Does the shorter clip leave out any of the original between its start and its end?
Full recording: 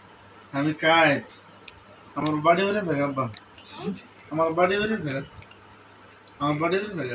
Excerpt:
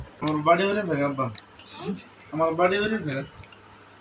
no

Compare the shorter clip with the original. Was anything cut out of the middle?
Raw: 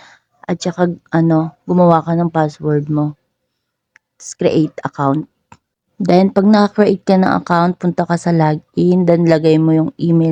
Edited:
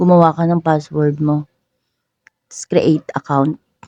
no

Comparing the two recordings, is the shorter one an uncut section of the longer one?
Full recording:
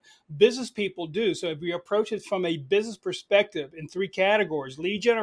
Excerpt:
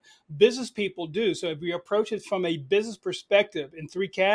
yes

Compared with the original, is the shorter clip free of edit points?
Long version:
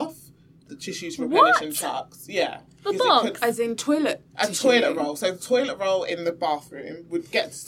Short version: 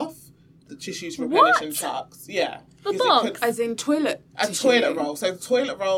yes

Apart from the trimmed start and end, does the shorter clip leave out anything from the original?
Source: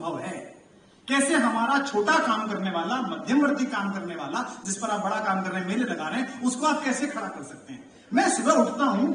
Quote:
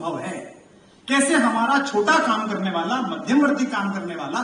no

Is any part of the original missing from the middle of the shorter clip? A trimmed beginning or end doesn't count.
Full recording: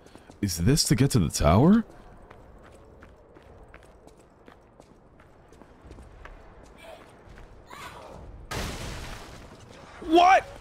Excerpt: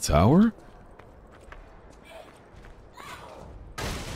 yes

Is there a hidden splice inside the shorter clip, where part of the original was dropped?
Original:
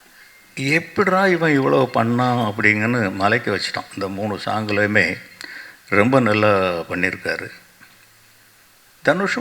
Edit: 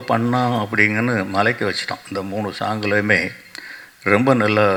no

